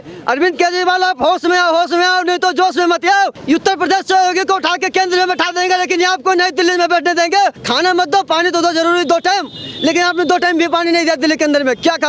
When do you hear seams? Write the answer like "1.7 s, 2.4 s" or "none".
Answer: 3.4 s, 7.6 s